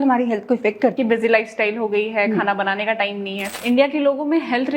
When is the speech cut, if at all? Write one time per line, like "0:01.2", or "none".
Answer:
0:00.9
0:03.5